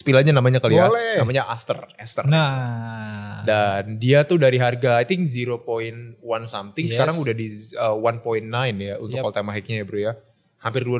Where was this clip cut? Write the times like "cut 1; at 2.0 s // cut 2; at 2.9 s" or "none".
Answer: none